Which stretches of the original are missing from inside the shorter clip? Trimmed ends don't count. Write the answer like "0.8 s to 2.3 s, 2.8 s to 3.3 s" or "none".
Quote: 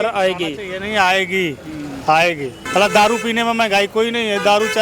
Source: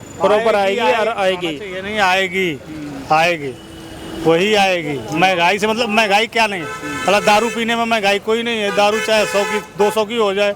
3.6 s to 6.9 s